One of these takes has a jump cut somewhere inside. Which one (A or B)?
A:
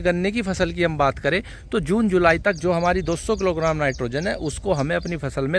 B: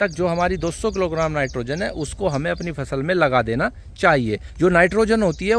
B